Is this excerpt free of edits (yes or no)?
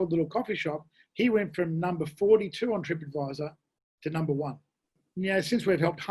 no